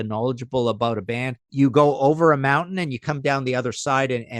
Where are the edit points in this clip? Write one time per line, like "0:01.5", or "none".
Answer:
0:01.5